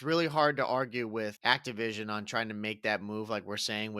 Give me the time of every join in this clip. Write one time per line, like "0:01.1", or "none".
0:01.4